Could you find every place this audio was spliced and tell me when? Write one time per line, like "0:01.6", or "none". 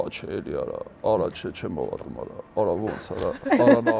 none